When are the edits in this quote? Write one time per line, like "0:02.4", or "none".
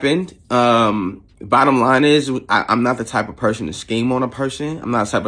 0:01.3